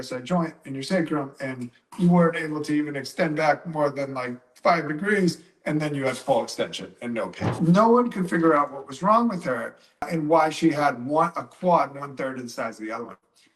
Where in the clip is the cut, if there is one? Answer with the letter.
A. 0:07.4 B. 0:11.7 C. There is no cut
A